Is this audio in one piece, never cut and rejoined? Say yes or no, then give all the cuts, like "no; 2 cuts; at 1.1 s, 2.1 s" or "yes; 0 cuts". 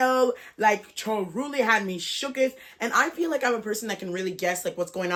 yes; 0 cuts